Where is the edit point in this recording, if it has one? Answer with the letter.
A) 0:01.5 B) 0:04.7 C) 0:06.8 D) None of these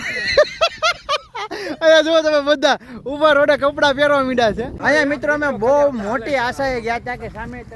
B